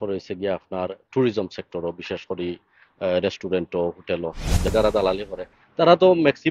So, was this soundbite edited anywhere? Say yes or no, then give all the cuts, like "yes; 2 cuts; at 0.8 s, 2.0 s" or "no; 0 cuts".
yes; 1 cut; at 4.7 s